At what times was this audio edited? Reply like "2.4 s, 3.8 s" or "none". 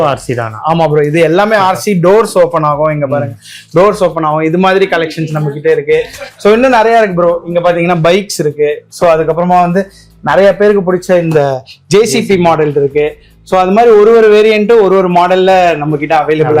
none